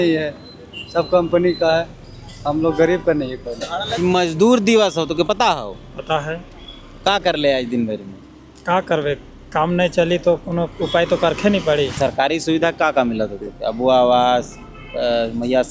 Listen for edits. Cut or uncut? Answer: cut